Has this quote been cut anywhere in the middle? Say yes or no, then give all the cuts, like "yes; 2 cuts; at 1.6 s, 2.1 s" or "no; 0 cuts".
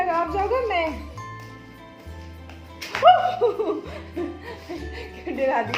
no; 0 cuts